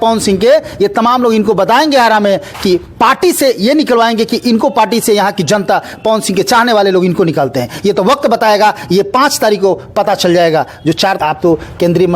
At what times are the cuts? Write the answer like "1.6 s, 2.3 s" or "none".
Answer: 11.2 s